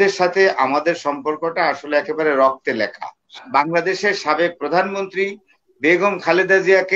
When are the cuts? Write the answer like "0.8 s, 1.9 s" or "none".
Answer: 3.4 s